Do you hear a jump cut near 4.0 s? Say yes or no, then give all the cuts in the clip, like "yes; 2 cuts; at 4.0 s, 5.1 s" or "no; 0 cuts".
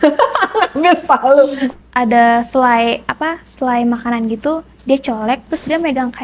no; 1 cut; at 1.7 s